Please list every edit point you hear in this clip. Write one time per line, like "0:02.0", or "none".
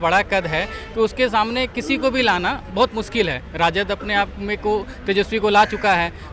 none